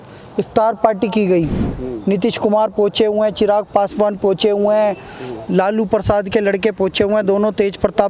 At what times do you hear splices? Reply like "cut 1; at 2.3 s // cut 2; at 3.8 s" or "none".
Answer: none